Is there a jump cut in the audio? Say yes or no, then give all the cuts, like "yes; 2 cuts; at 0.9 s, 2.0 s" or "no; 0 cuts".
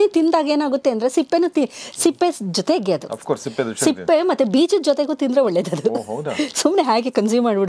no; 0 cuts